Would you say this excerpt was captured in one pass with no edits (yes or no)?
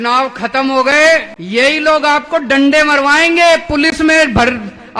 no